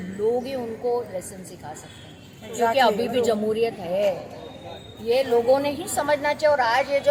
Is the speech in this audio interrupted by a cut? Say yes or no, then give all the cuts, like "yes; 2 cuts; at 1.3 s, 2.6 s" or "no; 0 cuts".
no; 0 cuts